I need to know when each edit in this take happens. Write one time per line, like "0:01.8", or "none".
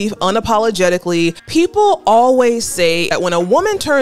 0:03.1